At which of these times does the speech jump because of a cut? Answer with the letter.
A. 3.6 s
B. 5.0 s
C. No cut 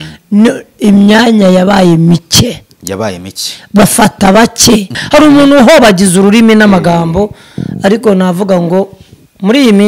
B